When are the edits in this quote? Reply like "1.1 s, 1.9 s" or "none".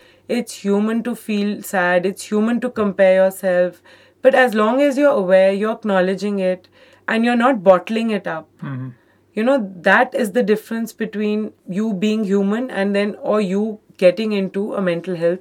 11.6 s